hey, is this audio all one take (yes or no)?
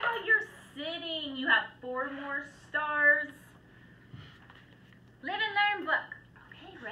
no